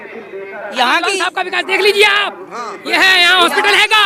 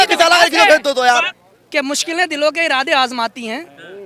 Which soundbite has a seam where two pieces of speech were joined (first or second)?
second